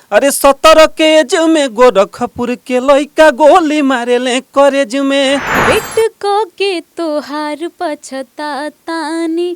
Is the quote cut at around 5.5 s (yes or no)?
yes